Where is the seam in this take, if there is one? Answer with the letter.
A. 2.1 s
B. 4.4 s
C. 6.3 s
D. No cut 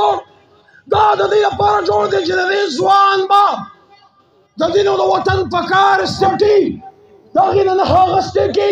C